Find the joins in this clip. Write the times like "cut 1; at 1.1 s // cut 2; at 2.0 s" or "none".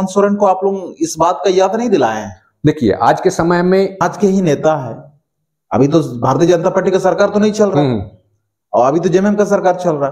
cut 1; at 4.0 s